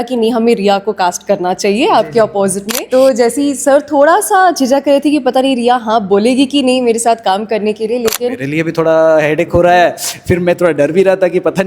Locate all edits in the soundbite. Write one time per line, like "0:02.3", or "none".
0:02.6
0:08.4